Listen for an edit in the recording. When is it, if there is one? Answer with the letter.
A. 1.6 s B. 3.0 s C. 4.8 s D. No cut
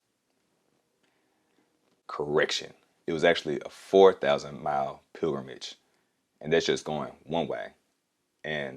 D